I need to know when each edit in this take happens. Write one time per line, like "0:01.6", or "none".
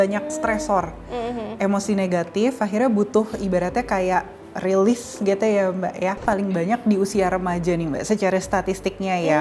0:06.2